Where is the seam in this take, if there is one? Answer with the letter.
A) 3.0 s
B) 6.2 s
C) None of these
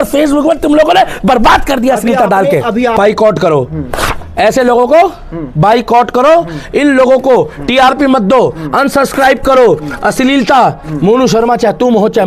A